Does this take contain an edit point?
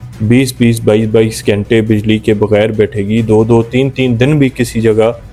no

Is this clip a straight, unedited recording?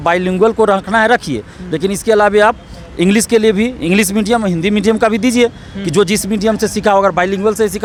yes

